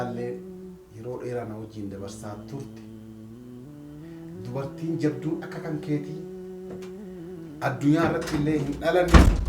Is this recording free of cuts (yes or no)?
no